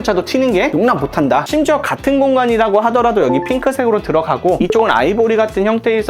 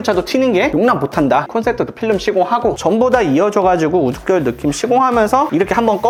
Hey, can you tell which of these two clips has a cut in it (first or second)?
first